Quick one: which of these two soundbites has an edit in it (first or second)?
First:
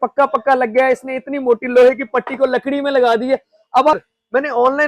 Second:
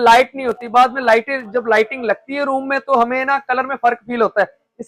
first